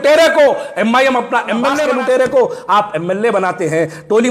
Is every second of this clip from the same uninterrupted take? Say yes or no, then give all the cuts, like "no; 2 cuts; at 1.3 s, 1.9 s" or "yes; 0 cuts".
no; 1 cut; at 1.8 s